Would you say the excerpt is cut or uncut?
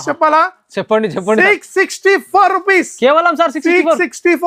uncut